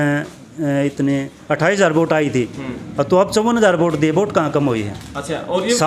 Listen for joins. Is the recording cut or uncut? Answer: uncut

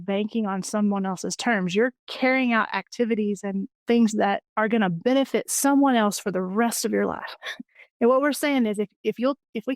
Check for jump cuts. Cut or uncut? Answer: cut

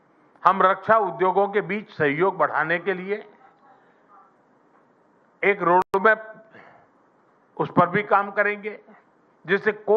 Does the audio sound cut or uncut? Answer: uncut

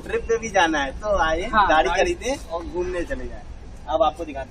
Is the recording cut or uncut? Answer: uncut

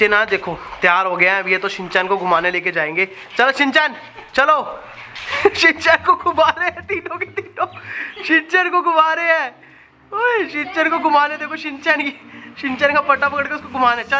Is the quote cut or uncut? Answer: uncut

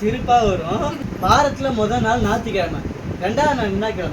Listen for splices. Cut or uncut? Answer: cut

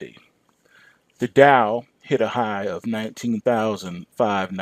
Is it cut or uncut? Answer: cut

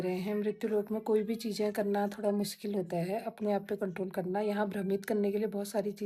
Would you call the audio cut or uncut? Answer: uncut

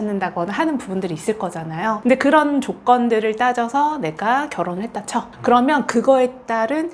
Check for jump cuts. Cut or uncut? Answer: uncut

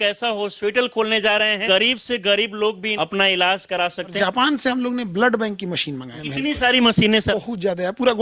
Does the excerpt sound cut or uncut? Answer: cut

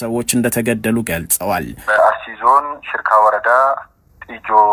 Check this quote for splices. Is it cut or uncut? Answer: cut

